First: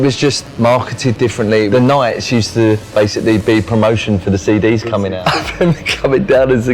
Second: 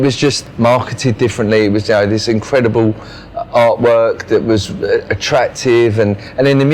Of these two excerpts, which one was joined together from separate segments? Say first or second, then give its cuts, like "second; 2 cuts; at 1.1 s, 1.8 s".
first; 2 cuts; at 1.7 s, 5.1 s